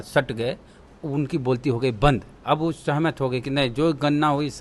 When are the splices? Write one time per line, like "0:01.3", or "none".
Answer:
none